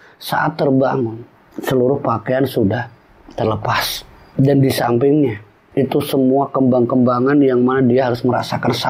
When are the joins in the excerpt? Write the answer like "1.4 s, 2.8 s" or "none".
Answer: none